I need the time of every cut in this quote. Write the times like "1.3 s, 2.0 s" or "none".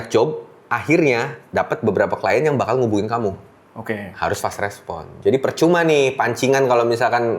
1.4 s, 4.1 s